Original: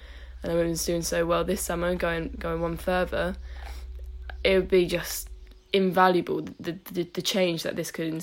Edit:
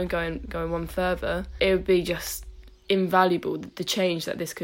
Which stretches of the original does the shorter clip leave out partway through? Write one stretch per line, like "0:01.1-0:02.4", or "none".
0:03.4-0:04.3
0:06.6-0:07.1